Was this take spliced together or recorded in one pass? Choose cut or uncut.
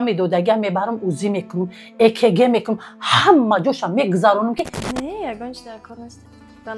cut